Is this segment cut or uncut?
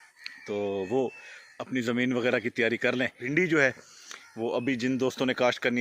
cut